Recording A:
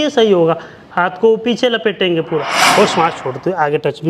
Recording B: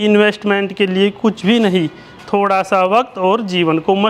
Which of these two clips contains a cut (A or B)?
A